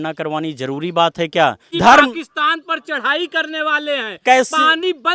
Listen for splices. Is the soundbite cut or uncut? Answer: cut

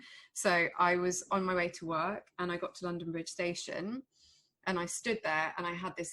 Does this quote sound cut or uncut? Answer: uncut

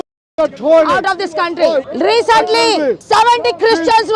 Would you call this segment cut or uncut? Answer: cut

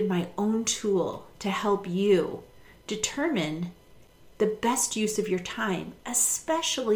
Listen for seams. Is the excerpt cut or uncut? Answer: uncut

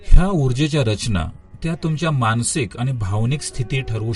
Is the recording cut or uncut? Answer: cut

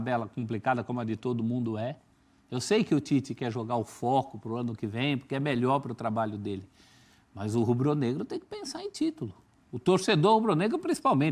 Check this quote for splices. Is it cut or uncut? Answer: uncut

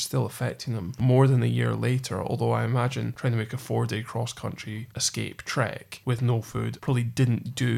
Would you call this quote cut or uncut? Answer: cut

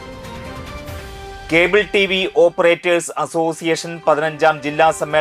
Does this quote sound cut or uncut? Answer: cut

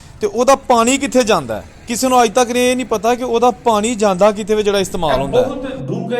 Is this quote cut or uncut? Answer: cut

